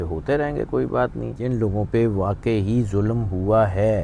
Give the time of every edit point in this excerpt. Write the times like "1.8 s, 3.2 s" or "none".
1.3 s